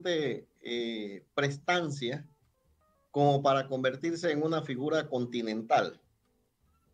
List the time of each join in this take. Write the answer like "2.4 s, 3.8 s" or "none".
none